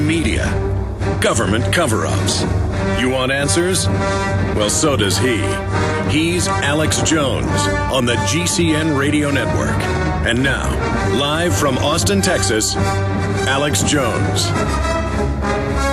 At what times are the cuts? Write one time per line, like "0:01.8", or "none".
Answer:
none